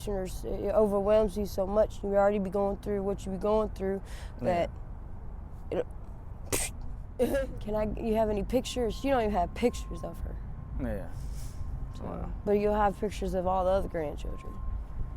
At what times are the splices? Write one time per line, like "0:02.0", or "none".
0:07.3